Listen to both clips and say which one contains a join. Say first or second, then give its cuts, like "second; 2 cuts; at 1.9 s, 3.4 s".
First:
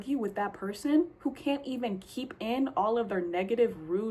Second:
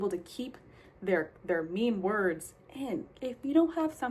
second; 1 cut; at 3.1 s